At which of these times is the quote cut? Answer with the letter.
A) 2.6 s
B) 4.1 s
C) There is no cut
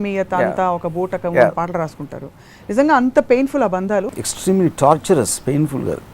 B